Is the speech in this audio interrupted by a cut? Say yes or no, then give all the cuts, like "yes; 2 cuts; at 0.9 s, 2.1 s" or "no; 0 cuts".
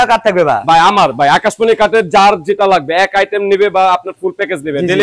no; 0 cuts